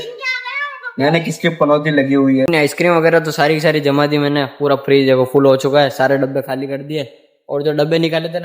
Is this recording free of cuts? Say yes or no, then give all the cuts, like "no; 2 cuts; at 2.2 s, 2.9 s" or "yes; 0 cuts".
no; 1 cut; at 2.5 s